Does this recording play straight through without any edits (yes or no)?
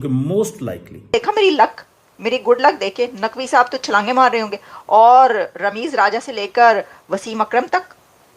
no